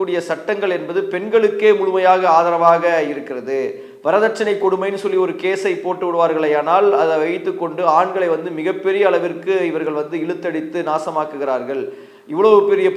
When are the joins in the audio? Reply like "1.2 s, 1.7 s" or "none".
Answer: none